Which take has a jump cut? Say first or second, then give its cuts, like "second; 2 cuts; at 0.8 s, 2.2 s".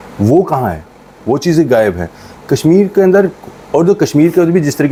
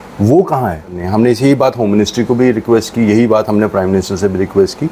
second; 1 cut; at 1.0 s